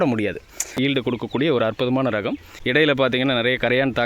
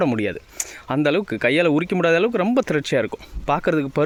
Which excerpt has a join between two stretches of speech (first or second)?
first